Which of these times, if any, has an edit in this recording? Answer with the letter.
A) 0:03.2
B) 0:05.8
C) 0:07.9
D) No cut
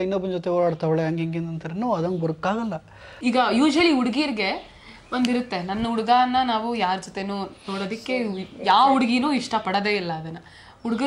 A